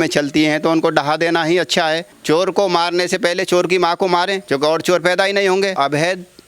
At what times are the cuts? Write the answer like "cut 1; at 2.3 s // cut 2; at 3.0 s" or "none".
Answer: cut 1; at 2.1 s // cut 2; at 4.4 s // cut 3; at 5.7 s

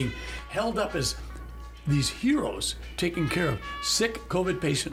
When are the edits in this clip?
none

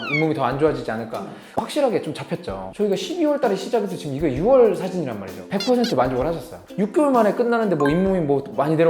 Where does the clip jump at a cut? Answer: cut 1; at 1.3 s // cut 2; at 6.6 s

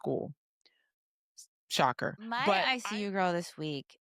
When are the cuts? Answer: cut 1; at 2.7 s

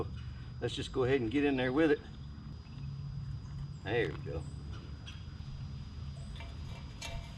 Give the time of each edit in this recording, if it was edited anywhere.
cut 1; at 2.5 s // cut 2; at 5.4 s

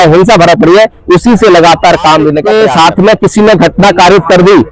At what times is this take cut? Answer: cut 1; at 2.4 s

